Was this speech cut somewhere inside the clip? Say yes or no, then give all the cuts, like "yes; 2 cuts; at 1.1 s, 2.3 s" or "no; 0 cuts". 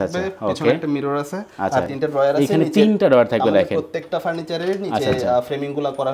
no; 0 cuts